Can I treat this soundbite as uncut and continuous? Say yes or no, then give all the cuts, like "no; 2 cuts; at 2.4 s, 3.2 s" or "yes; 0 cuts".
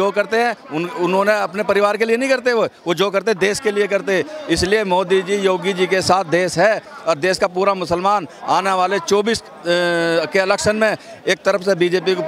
yes; 0 cuts